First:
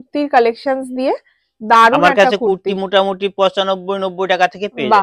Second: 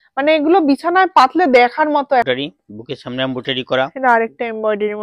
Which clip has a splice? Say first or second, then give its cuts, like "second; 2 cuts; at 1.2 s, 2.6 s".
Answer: second; 1 cut; at 2.2 s